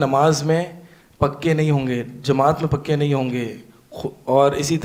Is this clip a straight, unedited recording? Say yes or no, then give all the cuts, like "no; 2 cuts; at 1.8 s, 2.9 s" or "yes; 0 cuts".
yes; 0 cuts